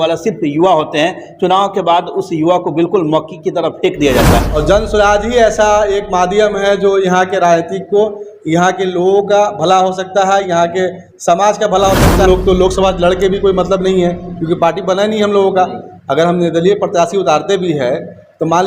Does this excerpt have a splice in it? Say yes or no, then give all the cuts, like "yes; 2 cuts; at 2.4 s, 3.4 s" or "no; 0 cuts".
yes; 2 cuts; at 4.6 s, 12.2 s